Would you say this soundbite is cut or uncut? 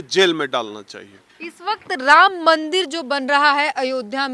uncut